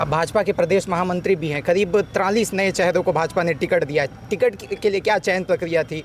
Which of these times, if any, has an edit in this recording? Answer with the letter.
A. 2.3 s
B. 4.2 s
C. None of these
C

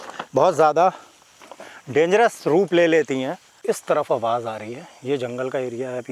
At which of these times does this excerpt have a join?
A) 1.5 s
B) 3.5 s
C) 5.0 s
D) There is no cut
B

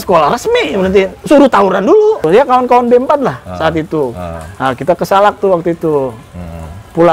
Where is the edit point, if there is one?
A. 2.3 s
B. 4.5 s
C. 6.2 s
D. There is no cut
A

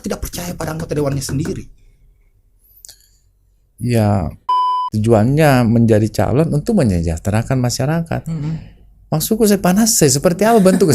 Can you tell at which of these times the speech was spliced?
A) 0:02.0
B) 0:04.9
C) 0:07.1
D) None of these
B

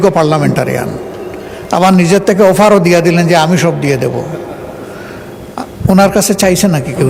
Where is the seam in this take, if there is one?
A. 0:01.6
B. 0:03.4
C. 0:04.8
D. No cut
D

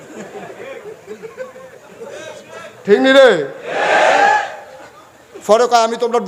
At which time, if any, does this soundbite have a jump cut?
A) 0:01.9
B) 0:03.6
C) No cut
C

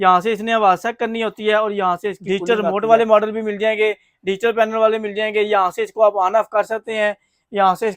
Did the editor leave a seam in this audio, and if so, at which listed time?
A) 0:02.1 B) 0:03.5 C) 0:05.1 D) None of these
A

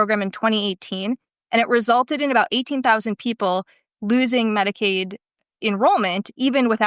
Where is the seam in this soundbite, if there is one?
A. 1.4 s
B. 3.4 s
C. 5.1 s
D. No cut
D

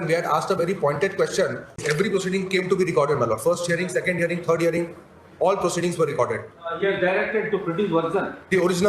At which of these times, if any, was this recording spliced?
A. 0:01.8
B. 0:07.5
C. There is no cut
A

